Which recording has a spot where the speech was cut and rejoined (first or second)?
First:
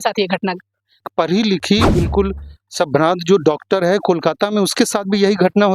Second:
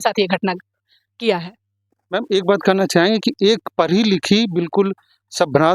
first